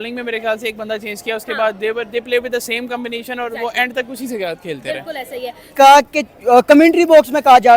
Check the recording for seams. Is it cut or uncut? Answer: cut